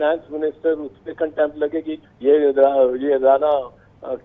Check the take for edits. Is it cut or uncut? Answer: cut